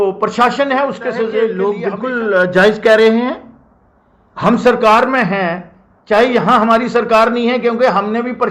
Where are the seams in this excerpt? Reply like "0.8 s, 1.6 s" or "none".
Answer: 1.6 s